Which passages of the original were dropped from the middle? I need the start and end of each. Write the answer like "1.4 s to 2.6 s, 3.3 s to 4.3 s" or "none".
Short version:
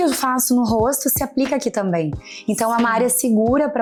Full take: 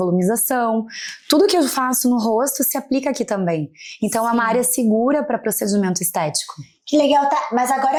none